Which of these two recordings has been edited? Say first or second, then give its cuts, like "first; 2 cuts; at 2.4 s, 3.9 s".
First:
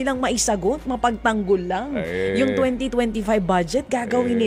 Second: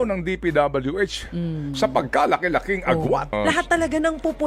second; 1 cut; at 3.3 s